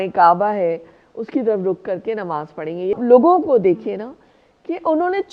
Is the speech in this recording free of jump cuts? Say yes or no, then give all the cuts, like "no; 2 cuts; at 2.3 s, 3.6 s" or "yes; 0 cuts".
no; 1 cut; at 3.0 s